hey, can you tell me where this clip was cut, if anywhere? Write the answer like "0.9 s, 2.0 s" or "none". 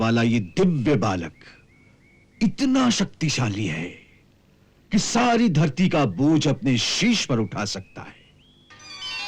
none